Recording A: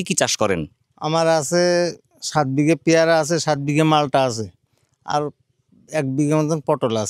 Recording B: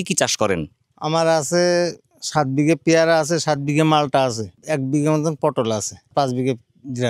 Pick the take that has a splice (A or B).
B